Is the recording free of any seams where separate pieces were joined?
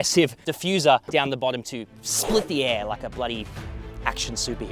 yes; 0 cuts

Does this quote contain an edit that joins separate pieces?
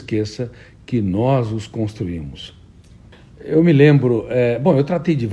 no; 0 cuts

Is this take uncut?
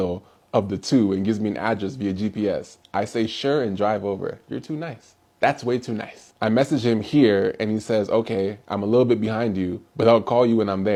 yes; 0 cuts

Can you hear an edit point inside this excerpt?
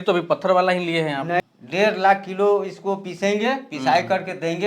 yes; 1 cut; at 1.5 s

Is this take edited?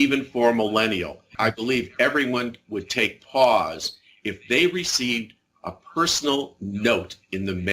yes; 1 cut; at 1.2 s

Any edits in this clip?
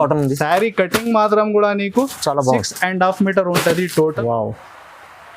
yes; 1 cut; at 4.2 s

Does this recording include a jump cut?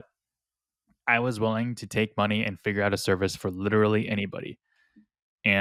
no; 0 cuts

